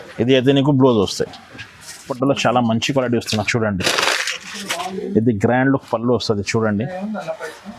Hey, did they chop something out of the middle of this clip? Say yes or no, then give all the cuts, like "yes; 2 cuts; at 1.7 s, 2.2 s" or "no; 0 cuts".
yes; 1 cut; at 2.1 s